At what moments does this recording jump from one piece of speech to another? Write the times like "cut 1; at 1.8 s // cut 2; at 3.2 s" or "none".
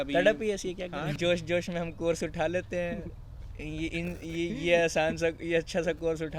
cut 1; at 1.1 s